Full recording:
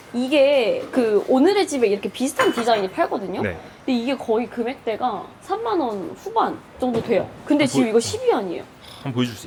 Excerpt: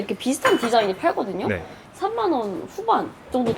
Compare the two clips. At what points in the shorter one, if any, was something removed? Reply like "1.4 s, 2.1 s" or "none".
1.8 s